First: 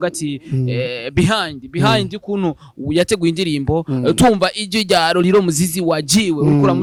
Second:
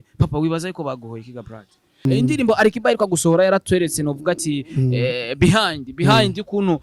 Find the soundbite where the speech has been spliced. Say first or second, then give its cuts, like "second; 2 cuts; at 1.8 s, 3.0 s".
second; 1 cut; at 2.1 s